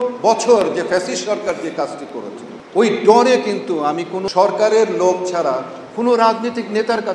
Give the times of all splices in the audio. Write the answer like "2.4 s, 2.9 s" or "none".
2.5 s, 4.2 s